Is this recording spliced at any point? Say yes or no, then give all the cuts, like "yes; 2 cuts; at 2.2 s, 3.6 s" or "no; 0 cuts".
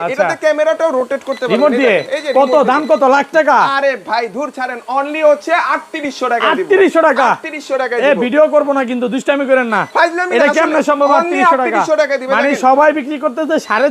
no; 0 cuts